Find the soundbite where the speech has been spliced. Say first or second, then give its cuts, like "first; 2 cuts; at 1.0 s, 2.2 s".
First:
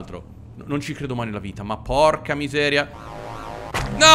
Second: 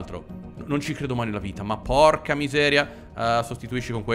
first; 1 cut; at 3.0 s